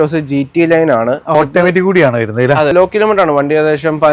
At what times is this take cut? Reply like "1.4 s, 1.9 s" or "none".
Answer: 1.3 s, 2.7 s